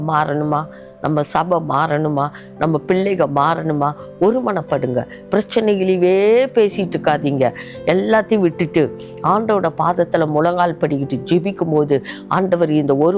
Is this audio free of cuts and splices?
yes; 0 cuts

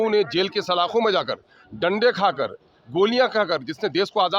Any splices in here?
no; 0 cuts

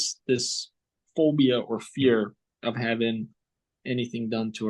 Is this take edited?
no; 0 cuts

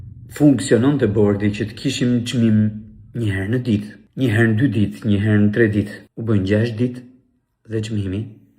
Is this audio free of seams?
no; 2 cuts; at 4.0 s, 6.1 s

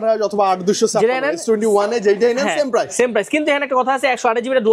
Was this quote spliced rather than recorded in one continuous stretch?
no; 0 cuts

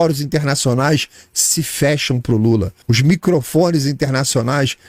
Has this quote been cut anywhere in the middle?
yes; 1 cut; at 2.8 s

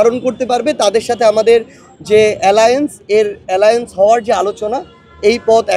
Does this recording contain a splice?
no; 0 cuts

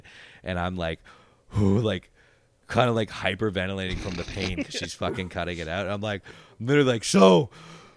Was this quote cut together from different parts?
no; 0 cuts

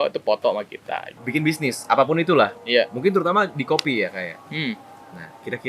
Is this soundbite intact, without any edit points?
no; 1 cut; at 1.1 s

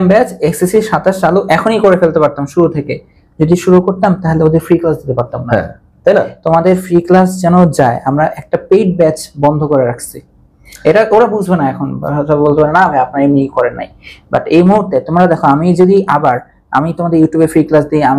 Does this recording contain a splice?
no; 0 cuts

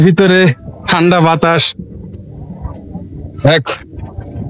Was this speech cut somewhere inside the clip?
no; 0 cuts

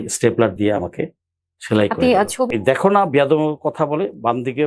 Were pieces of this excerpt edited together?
yes; 1 cut; at 2.5 s

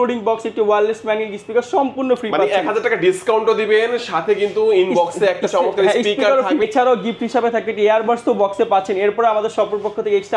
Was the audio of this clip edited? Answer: yes; 1 cut; at 6.6 s

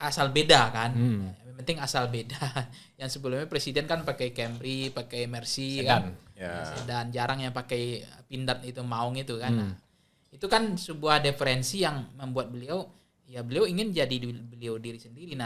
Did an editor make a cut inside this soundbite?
no; 0 cuts

